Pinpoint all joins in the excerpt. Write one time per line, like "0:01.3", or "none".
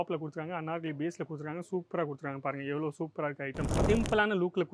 0:03.8